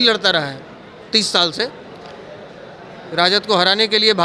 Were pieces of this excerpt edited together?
no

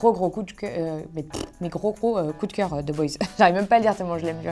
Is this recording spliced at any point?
no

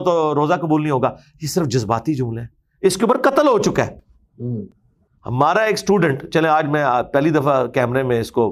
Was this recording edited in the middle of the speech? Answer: no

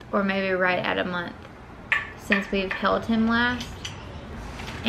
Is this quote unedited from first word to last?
yes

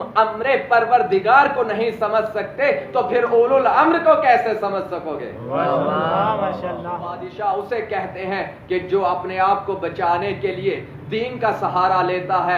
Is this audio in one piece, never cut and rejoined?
no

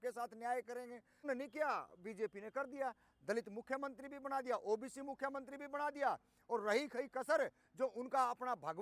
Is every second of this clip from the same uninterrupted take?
no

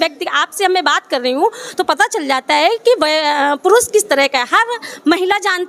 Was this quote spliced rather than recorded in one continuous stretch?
no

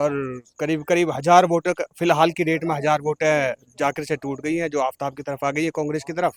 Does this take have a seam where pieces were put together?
no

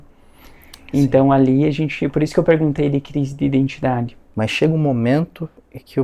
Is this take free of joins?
no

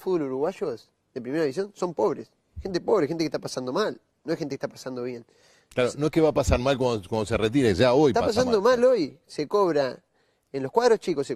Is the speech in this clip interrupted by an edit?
yes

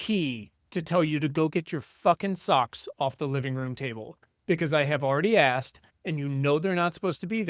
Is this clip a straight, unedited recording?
yes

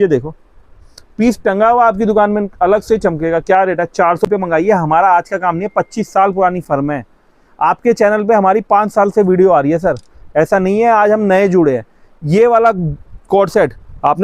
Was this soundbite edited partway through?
yes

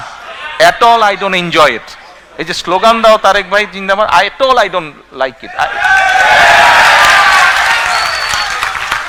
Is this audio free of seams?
yes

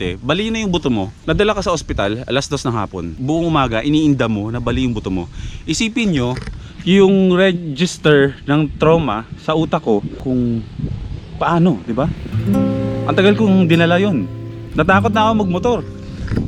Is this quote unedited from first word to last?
no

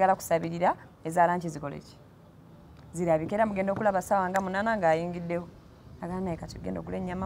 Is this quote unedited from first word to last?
yes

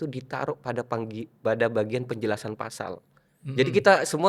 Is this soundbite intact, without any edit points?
yes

